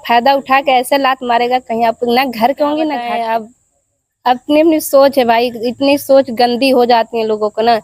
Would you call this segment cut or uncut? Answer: cut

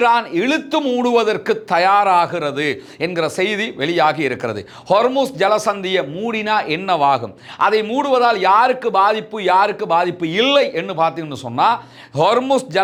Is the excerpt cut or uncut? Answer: uncut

